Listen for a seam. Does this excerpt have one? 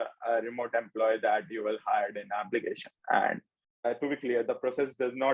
yes; 1 cut; at 3.7 s

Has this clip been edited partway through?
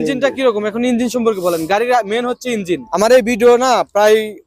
yes; 1 cut; at 2.9 s

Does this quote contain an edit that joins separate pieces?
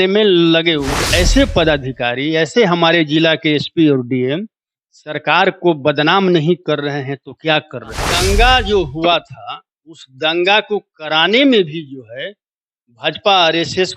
yes; 2 cuts; at 1.0 s, 8.0 s

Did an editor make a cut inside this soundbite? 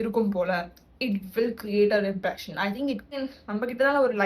yes; 1 cut; at 3.1 s

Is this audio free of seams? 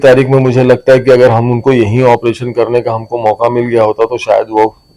yes; 0 cuts

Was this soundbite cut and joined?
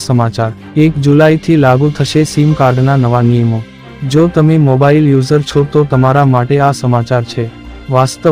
no; 0 cuts

